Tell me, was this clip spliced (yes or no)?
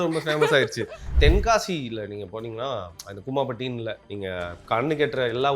yes